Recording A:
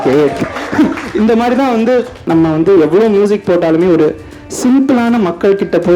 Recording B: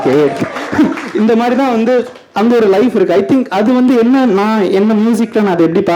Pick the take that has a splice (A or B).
A